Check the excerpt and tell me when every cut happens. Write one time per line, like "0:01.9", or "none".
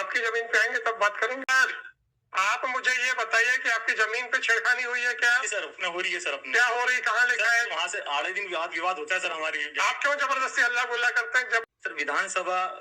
0:01.5
0:11.6